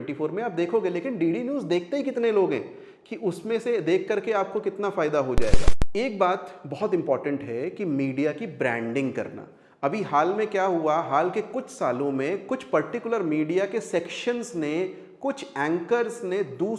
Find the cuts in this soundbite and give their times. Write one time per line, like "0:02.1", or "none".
none